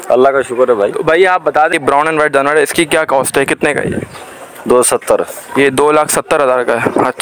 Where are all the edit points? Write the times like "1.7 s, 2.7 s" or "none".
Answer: 1.7 s

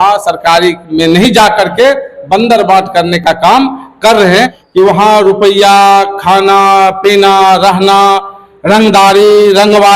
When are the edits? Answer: 4.6 s

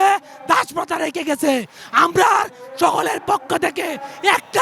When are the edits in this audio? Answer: none

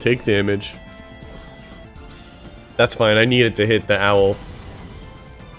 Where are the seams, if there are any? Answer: 1.8 s

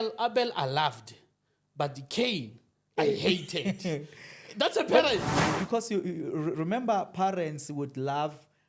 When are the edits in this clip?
5.3 s

